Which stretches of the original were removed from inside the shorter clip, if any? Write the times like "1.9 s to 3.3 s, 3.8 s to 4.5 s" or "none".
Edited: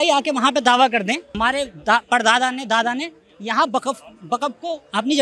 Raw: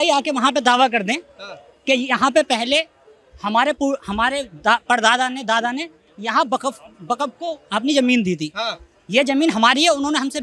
1.3 s to 4.1 s

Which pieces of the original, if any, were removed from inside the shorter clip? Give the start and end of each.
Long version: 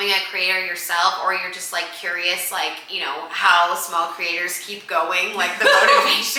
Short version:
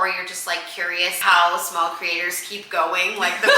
2.4 s to 3.3 s

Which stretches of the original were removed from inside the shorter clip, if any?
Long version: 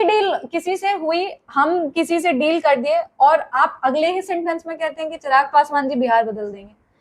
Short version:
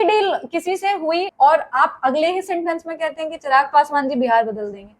1.3 s to 3.1 s

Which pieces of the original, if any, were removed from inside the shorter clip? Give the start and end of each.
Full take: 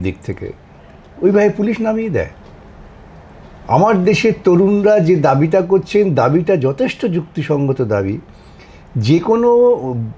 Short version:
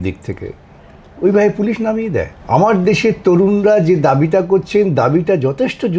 2.3 s to 3.5 s

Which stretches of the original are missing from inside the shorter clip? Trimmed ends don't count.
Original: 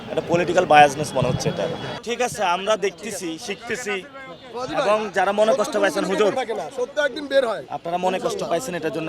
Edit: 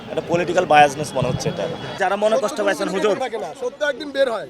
1.9 s to 5.1 s

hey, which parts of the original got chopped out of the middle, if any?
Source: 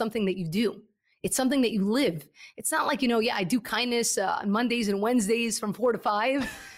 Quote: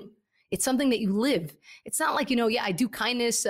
none

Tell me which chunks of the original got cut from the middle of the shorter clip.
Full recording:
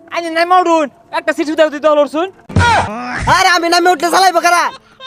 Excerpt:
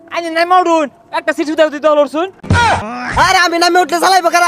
2.7 s to 2.8 s

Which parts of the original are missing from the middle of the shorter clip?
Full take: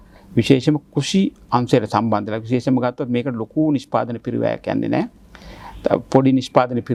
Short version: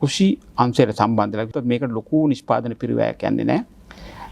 2.4 s to 2.9 s

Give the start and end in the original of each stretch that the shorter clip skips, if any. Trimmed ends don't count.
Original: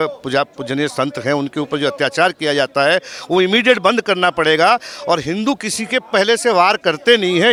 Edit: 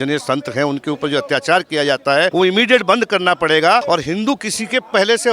3.0 s to 3.3 s, 4.8 s to 5.0 s

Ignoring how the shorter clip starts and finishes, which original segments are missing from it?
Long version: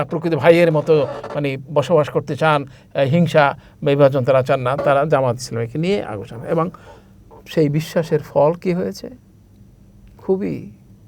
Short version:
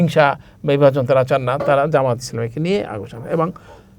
none

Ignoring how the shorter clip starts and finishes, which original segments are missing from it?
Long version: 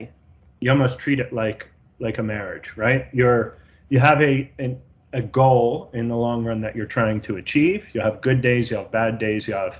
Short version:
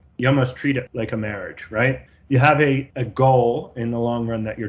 1.3 s to 1.9 s, 3.1 s to 3.6 s, 4.6 s to 5.1 s

